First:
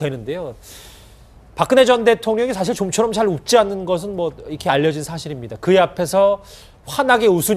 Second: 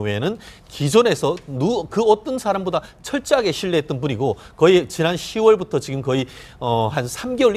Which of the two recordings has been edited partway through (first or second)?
second